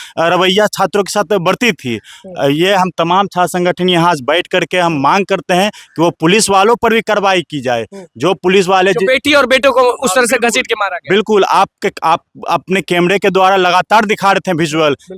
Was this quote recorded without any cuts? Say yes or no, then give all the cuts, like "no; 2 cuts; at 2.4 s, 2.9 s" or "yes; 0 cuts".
yes; 0 cuts